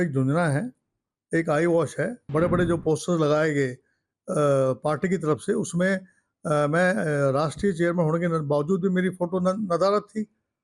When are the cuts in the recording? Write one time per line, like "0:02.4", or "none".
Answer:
0:02.2